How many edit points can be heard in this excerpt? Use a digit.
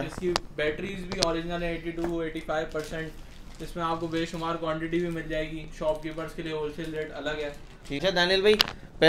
1